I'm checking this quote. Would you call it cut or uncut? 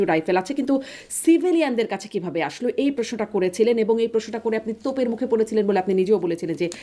uncut